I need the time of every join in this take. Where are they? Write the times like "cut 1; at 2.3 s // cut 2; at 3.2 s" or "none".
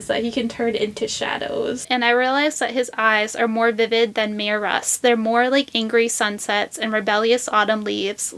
cut 1; at 1.8 s